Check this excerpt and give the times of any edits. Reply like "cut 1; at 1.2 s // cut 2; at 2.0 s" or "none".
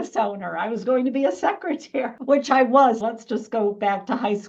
cut 1; at 3.0 s